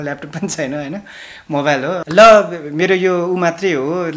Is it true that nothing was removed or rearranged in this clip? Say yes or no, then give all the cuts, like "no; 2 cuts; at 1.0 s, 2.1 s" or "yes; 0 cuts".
no; 1 cut; at 2.0 s